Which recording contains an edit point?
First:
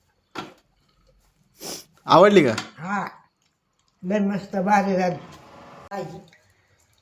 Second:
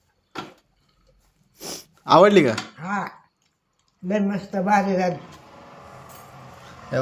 first; 1 cut; at 5.8 s

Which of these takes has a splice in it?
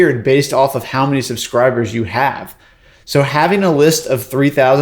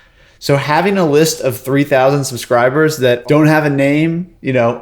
second; 1 cut; at 3.2 s

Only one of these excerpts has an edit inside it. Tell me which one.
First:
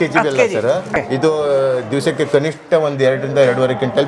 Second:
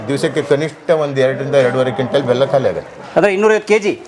first; 1 cut; at 0.9 s

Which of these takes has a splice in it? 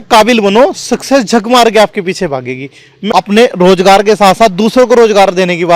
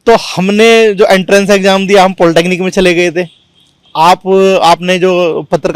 first; 1 cut; at 2.9 s

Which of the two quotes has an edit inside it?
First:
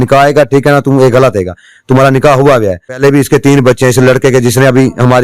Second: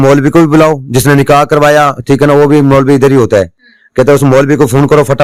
first; 1 cut; at 2.8 s

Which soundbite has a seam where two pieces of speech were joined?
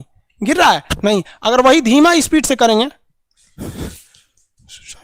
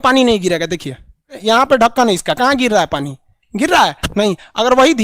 second; 1 cut; at 1.3 s

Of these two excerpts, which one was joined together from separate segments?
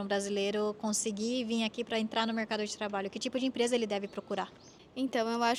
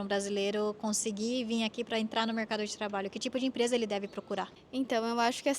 second; 1 cut; at 4.6 s

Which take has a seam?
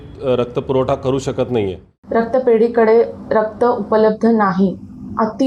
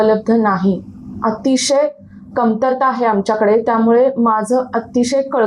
first; 1 cut; at 1.9 s

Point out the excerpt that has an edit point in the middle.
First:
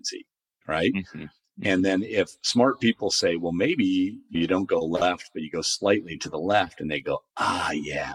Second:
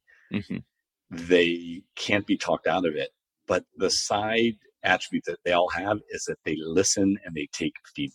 second; 1 cut; at 3.7 s

